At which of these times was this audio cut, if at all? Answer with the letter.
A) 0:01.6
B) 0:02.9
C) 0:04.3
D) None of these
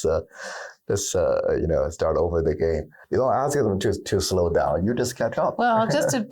B